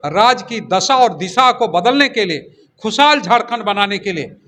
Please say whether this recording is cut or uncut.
uncut